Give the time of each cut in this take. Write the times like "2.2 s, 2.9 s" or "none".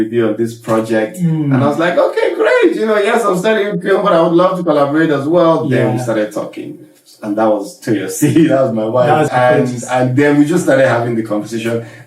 9.3 s